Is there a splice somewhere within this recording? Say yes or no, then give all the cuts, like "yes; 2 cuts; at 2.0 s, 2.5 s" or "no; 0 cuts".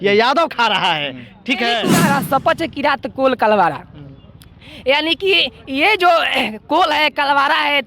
yes; 1 cut; at 2.0 s